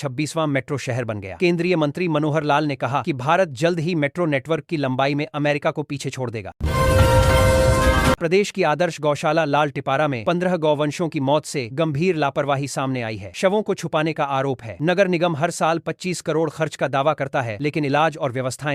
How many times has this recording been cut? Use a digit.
0